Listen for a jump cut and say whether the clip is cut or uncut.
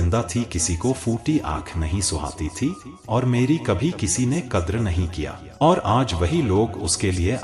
cut